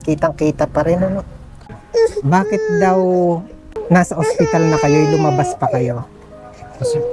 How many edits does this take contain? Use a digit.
2